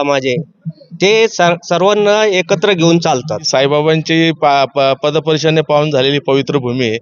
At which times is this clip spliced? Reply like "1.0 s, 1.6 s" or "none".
3.5 s